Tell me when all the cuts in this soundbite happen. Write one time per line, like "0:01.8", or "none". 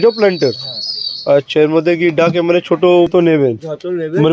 0:03.1